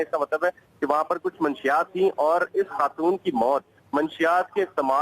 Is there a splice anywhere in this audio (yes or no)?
yes